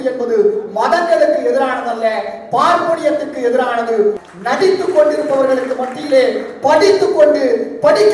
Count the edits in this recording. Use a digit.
1